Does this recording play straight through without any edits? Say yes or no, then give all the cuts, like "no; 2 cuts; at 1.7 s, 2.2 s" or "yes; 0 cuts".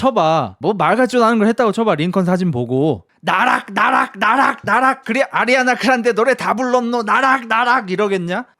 no; 1 cut; at 3.1 s